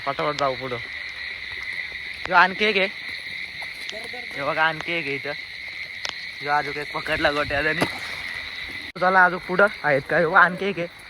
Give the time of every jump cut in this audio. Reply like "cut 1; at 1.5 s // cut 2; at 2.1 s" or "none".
cut 1; at 9.0 s